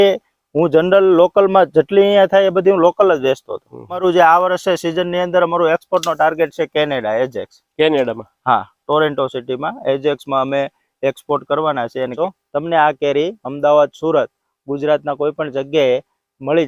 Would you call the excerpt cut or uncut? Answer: cut